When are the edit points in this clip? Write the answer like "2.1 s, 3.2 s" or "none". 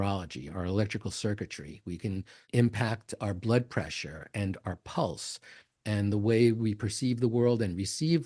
2.5 s